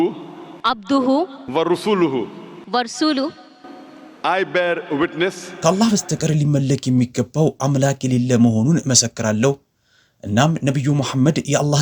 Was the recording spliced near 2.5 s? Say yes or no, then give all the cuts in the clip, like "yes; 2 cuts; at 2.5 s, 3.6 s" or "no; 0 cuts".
no; 1 cut; at 5.5 s